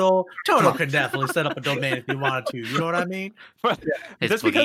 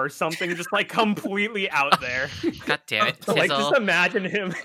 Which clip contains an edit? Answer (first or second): first